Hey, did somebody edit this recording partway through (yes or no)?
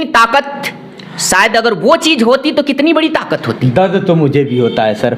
no